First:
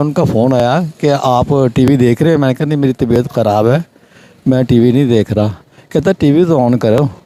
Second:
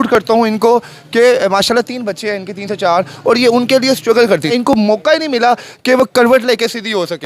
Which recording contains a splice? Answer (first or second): second